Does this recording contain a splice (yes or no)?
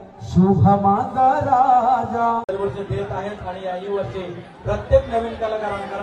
yes